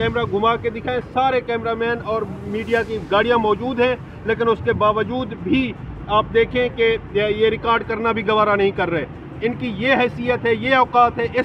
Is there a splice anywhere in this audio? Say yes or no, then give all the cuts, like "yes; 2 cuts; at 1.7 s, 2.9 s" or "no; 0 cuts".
no; 0 cuts